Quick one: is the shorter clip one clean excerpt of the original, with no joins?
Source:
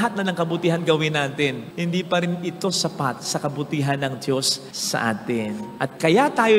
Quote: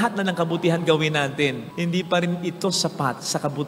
yes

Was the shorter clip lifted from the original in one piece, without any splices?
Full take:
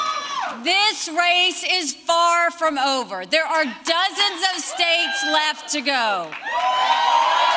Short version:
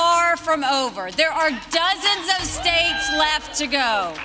yes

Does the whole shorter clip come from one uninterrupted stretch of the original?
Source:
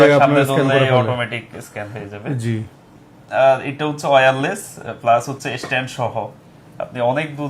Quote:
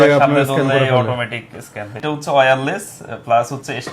no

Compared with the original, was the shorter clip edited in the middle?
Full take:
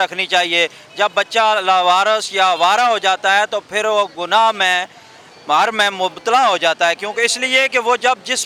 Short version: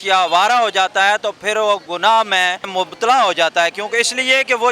yes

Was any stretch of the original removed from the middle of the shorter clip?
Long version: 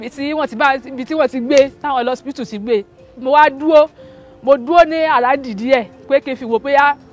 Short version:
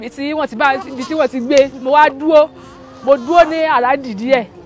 yes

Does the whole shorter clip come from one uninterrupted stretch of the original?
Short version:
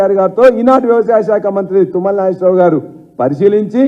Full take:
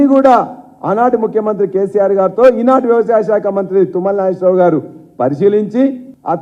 yes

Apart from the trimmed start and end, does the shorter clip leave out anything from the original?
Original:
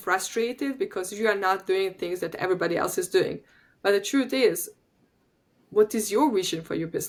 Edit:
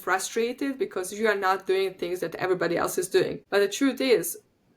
yes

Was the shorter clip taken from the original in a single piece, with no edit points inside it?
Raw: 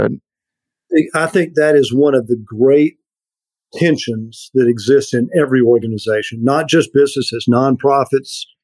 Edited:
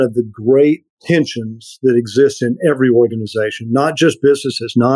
no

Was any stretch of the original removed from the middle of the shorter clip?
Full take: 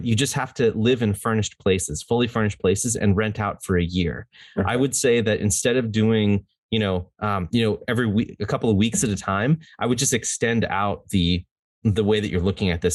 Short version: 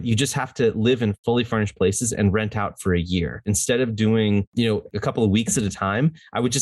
yes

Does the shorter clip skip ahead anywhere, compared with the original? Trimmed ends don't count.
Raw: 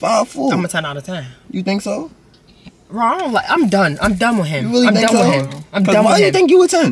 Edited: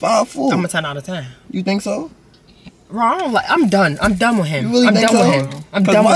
no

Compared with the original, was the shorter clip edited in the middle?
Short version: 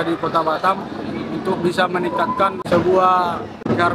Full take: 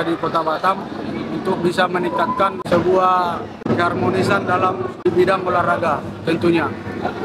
no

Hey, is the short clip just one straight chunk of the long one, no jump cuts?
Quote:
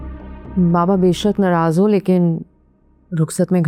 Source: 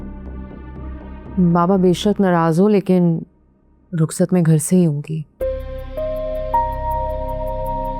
yes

